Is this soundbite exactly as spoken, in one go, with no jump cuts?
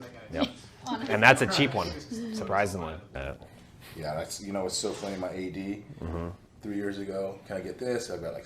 no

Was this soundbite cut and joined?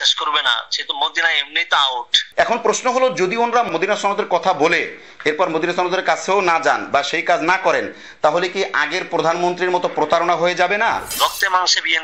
yes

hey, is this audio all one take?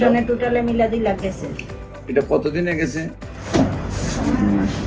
yes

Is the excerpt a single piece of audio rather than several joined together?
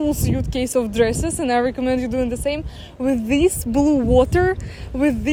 yes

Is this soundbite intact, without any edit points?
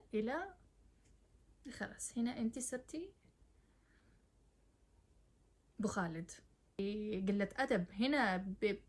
no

